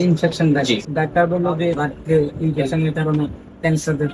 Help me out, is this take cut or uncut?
cut